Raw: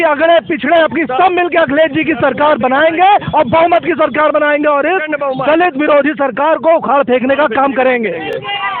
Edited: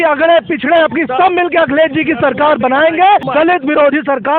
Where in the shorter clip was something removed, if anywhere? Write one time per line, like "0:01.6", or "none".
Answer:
0:03.3

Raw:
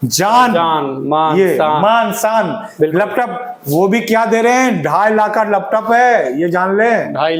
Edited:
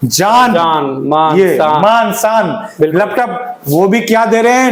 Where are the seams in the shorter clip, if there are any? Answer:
none

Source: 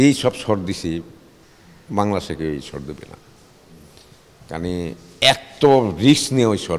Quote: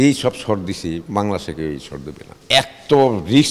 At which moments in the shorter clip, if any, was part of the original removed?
0:01.0
0:02.3

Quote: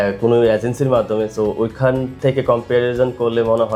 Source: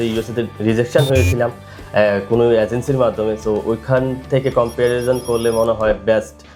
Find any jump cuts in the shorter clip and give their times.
none

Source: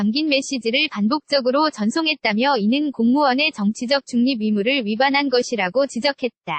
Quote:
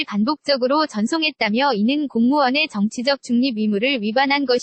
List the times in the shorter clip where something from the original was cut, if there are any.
none

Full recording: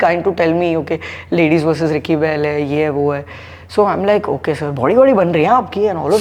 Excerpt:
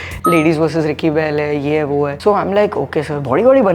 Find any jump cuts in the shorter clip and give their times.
0:02.2

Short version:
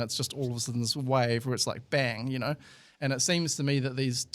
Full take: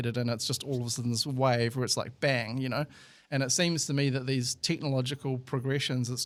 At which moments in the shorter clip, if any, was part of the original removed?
none

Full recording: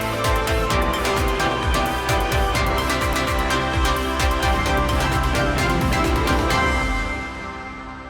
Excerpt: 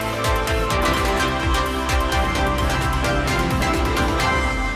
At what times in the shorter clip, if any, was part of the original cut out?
0:00.9

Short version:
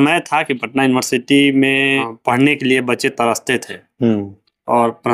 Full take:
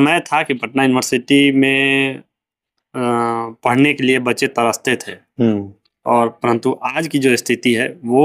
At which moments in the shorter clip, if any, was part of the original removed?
0:02.1

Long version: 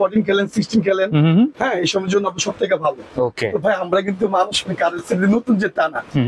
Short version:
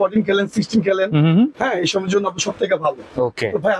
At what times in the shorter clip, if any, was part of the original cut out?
none

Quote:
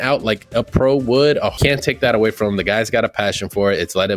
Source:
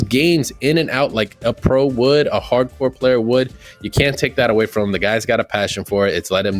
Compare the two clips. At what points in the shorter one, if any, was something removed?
0:01.5

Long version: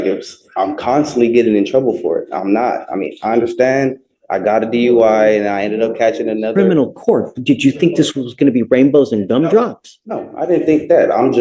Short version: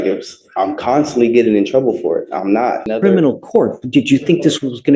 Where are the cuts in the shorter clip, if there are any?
0:02.9

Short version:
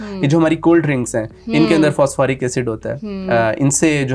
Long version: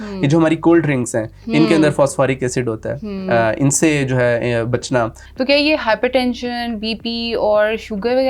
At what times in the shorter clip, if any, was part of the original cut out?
none

